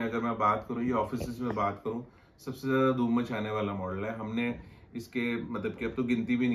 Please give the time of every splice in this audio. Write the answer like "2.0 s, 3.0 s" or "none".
none